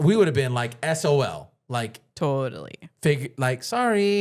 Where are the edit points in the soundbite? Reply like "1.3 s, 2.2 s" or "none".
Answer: none

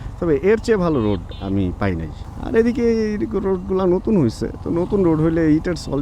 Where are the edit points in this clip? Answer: 2.3 s

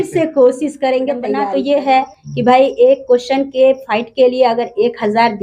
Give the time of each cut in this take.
1.4 s

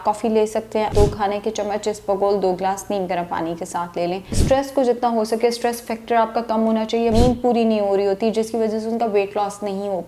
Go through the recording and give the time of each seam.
0.9 s, 4.4 s, 7.1 s

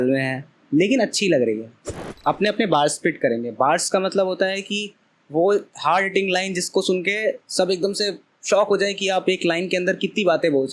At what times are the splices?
2.0 s

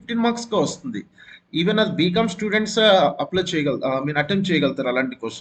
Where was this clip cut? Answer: none

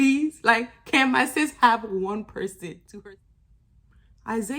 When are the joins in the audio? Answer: 3.0 s

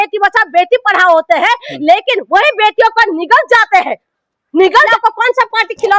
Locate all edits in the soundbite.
4.9 s

